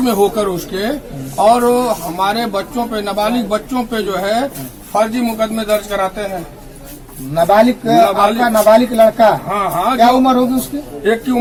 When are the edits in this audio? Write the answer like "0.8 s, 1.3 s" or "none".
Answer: none